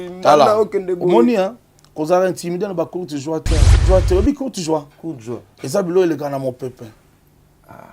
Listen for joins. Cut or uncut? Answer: cut